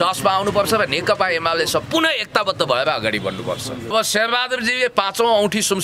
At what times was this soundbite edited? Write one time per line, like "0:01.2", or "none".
0:03.9